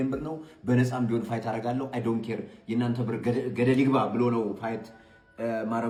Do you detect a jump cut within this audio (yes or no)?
no